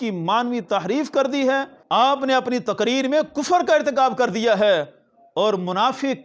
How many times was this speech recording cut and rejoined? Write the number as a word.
one